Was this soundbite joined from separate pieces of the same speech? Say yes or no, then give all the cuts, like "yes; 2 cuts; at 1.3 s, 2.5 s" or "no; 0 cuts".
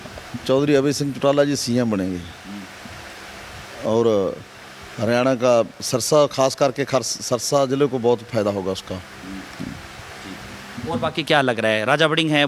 no; 0 cuts